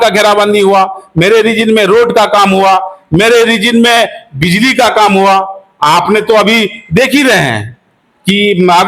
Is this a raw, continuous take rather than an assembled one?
yes; 0 cuts

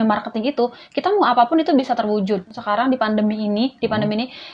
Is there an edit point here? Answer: yes; 1 cut; at 2.6 s

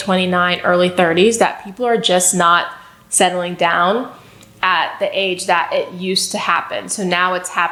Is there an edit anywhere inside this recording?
no; 0 cuts

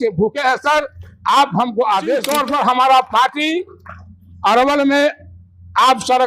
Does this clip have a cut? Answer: yes; 1 cut; at 2.3 s

